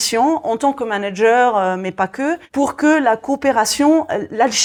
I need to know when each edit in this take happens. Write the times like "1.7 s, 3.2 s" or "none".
none

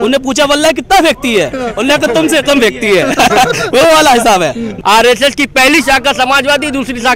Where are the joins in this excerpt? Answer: 4.7 s

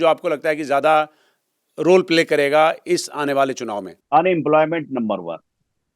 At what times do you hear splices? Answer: 3.9 s

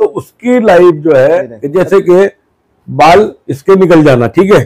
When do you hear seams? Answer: 1.6 s

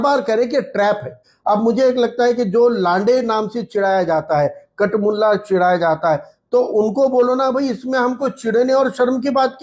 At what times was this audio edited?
1.3 s

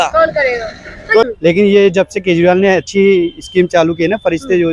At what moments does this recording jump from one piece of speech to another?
1.2 s

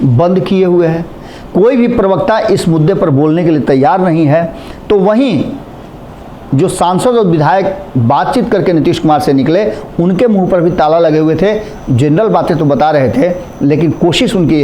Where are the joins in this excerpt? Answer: none

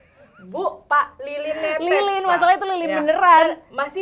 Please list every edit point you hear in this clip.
none

